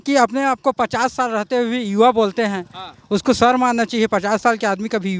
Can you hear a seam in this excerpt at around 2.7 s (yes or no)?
no